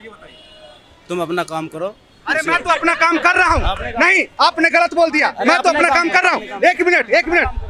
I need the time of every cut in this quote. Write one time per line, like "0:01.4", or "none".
none

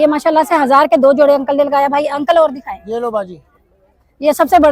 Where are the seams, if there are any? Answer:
none

